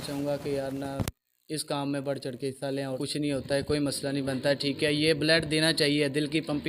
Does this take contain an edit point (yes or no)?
yes